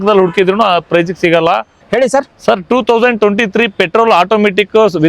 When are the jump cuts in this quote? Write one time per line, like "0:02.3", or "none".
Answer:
0:01.8